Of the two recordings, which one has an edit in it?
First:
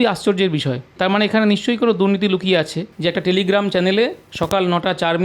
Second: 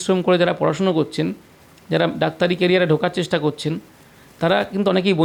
first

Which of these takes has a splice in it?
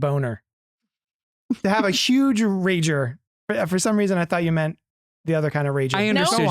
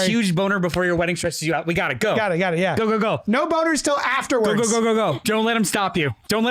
second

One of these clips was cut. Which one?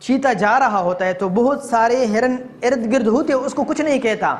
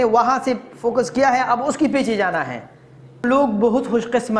second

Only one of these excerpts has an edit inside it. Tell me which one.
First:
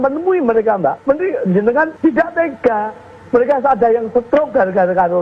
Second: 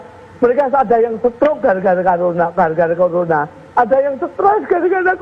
first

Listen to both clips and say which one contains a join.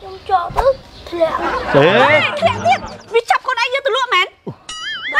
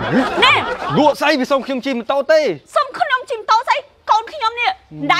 first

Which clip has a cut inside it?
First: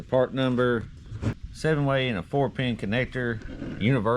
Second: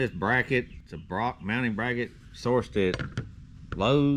first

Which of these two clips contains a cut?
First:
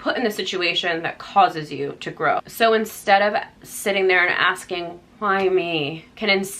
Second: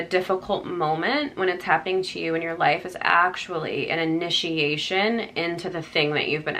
first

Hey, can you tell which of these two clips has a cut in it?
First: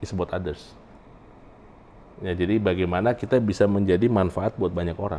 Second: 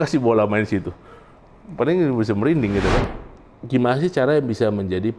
second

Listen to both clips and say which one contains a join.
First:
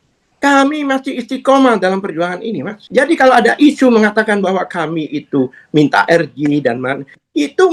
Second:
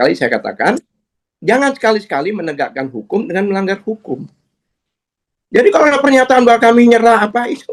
first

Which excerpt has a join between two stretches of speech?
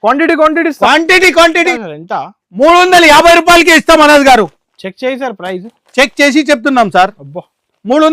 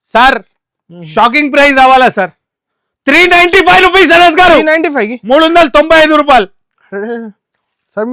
first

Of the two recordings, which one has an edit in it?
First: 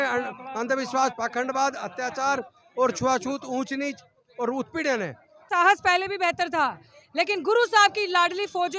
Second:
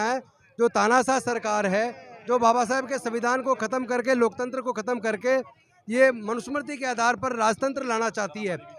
first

